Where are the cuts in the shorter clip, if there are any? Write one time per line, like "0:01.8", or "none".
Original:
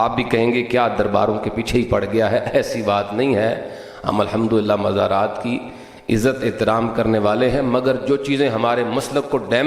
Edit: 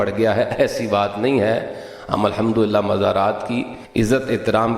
0:03.8